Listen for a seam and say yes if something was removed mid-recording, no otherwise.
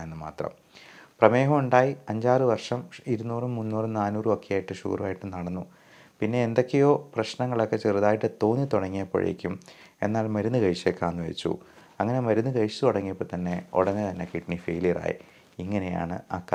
no